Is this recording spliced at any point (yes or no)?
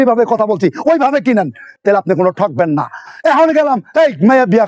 yes